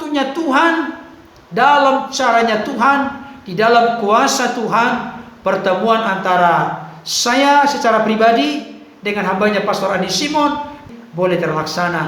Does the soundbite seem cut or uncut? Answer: cut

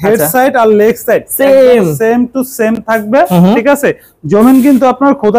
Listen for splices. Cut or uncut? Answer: uncut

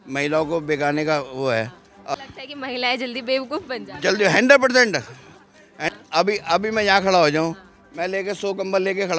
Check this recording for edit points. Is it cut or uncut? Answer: cut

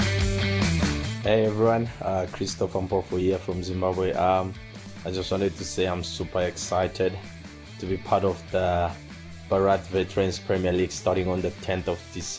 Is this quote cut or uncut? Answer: uncut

